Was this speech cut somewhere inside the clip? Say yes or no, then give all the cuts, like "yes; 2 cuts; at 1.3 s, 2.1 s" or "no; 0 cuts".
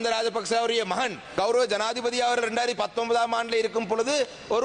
yes; 1 cut; at 1.2 s